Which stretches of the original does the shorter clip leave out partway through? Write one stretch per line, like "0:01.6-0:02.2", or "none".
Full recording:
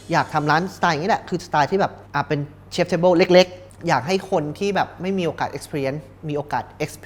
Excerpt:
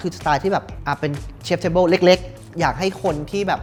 none